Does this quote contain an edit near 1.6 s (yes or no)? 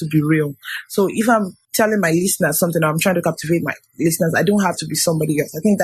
yes